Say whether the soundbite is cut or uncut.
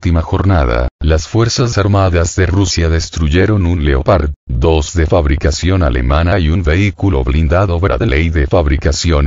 cut